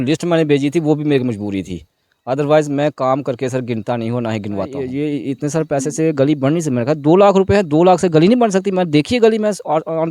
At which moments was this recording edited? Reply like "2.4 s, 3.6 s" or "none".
4.8 s

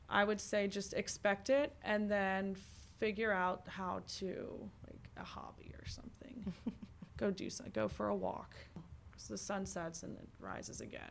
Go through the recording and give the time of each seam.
8.8 s

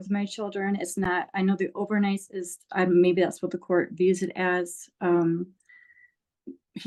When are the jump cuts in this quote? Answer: none

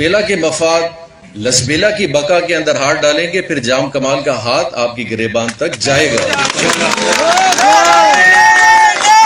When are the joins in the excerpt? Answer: none

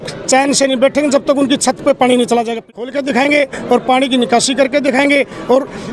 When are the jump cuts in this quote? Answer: 2.6 s

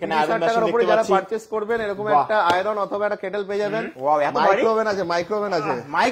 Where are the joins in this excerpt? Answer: 3.9 s

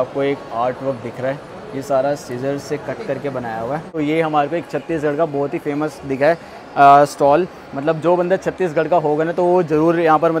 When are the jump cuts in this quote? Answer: 4.0 s

